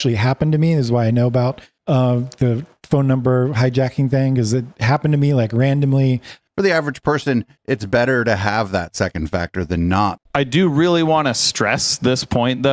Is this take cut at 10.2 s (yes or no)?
yes